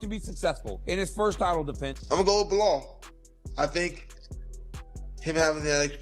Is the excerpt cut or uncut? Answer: cut